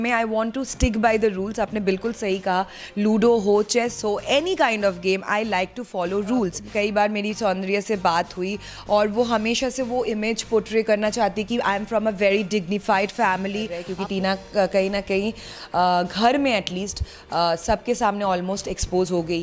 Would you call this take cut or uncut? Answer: cut